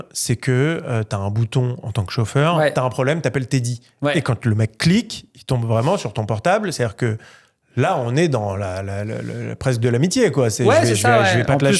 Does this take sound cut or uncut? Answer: uncut